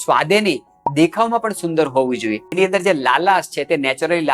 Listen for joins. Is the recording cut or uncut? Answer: cut